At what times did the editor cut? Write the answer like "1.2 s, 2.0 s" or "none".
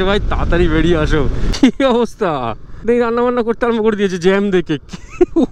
1.4 s, 2.9 s